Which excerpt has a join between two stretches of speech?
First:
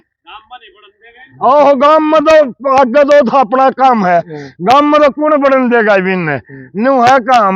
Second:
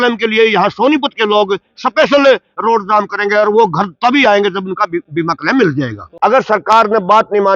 second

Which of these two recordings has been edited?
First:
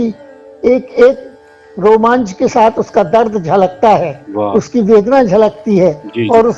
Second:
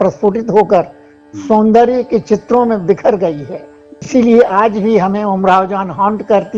second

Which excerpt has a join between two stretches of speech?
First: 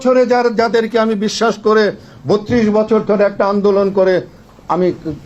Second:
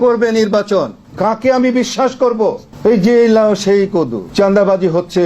second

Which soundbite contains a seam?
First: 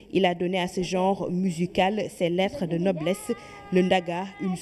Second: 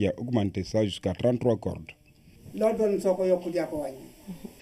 first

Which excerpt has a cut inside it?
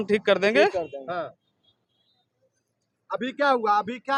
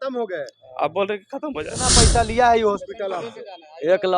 second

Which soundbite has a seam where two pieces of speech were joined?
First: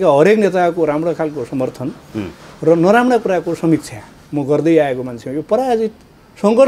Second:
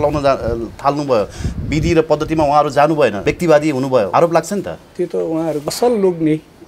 second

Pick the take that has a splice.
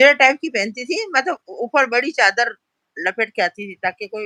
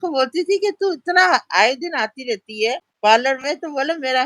second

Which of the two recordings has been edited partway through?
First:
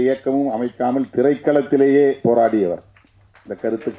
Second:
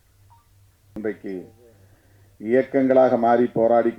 second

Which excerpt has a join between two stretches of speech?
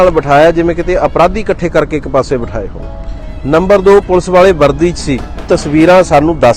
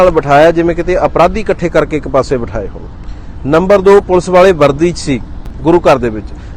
first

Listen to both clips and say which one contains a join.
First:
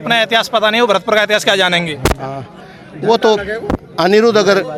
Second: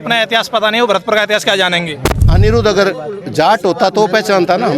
second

